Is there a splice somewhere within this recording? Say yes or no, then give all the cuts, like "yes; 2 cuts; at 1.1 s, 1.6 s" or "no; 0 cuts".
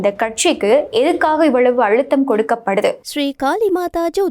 yes; 1 cut; at 3.0 s